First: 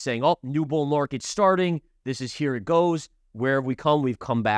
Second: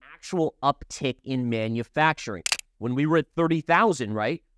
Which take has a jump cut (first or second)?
second